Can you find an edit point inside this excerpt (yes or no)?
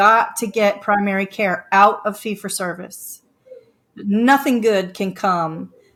no